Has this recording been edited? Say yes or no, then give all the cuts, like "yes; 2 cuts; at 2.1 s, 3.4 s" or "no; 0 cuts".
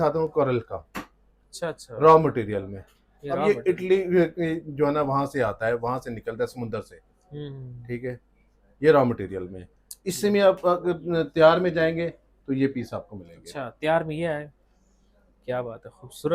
no; 0 cuts